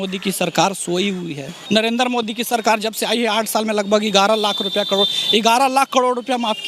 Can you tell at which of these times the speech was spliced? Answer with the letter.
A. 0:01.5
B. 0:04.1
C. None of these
A